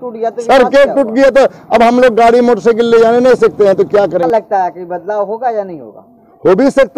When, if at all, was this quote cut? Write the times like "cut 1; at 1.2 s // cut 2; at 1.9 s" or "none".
cut 1; at 4.3 s